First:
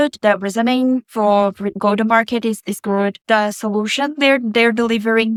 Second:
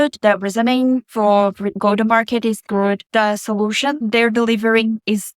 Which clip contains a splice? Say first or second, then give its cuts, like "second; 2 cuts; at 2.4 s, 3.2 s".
second; 2 cuts; at 2.6 s, 4.0 s